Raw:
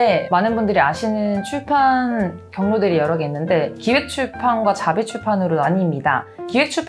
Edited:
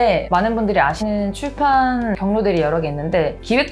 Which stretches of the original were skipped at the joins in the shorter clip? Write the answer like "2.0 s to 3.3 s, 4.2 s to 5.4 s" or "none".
1.0 s to 1.1 s, 2.3 s to 2.5 s